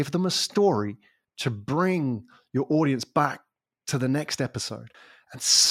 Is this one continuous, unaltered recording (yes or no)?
yes